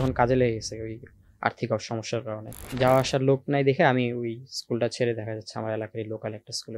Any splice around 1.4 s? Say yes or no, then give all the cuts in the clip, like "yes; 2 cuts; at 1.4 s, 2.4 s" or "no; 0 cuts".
no; 1 cut; at 2.6 s